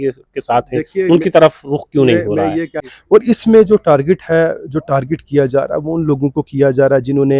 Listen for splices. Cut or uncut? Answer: cut